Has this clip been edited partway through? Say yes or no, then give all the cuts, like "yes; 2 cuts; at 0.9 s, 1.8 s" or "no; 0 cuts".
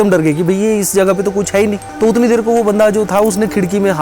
yes; 1 cut; at 1.9 s